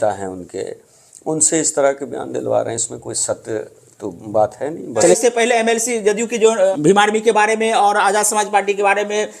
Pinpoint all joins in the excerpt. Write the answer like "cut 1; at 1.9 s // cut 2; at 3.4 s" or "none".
cut 1; at 5.2 s // cut 2; at 6.7 s